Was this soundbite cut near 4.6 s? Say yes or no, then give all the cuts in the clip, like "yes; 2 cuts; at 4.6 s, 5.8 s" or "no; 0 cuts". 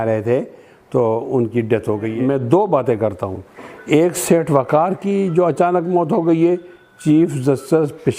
no; 1 cut; at 2.1 s